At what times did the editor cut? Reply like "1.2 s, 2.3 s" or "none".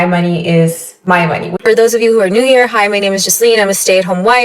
1.6 s